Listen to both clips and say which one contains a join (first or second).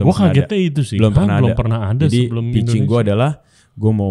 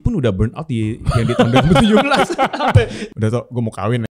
second